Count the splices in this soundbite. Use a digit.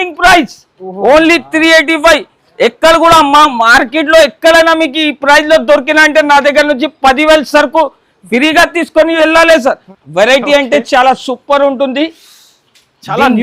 1